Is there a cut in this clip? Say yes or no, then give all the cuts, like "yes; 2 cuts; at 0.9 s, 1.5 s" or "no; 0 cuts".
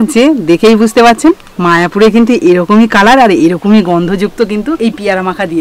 yes; 1 cut; at 1.5 s